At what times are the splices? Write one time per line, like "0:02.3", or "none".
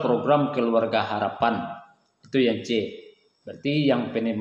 none